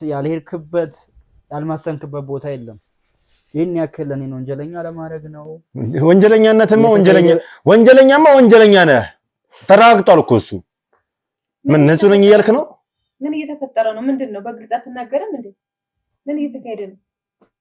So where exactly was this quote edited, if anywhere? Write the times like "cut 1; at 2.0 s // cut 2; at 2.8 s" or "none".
none